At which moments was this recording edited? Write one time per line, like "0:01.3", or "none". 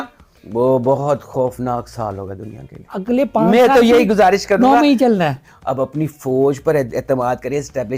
0:02.9
0:05.4